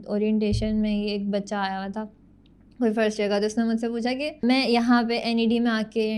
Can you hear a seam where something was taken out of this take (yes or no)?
yes